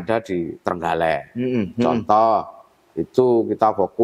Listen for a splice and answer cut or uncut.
uncut